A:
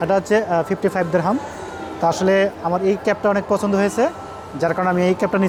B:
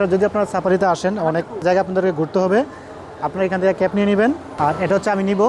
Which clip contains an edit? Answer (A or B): B